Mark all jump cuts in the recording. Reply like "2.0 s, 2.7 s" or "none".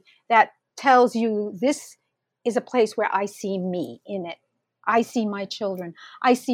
none